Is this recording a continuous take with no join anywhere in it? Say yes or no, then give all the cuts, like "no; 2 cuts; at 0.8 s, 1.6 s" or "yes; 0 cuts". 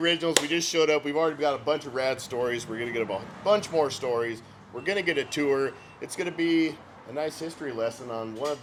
yes; 0 cuts